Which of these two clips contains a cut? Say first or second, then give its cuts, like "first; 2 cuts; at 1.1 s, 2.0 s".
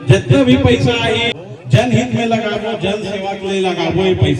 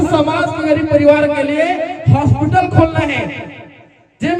first; 1 cut; at 1.3 s